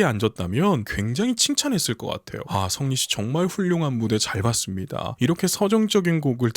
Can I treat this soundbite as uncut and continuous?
no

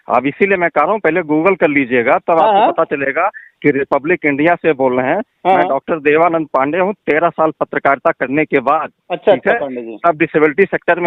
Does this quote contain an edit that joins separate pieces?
no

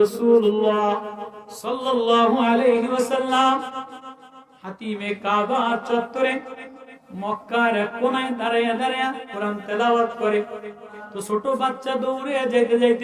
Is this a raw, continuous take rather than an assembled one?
no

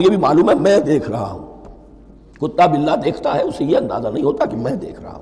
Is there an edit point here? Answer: no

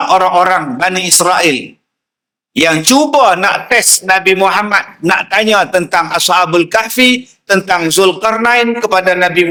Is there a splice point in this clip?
no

